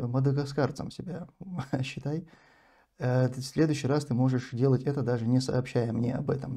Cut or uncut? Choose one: uncut